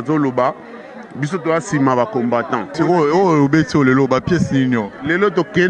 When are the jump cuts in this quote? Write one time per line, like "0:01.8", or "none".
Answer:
0:02.7